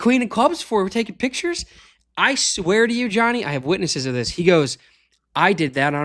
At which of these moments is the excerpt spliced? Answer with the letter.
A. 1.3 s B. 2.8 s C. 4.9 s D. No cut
D